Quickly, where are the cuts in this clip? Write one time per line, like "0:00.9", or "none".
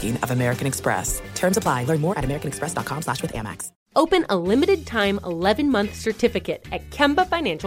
none